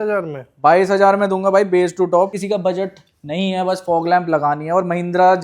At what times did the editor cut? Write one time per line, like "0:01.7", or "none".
0:02.4